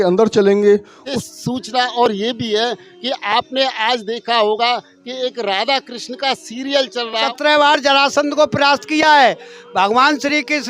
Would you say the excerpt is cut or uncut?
cut